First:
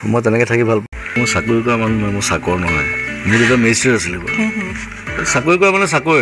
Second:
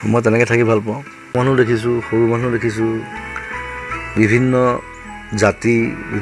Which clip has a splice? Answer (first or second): first